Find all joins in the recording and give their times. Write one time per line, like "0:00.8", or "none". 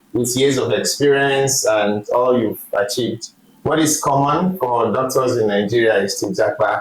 none